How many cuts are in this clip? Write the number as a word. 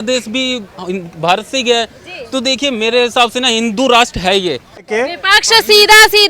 one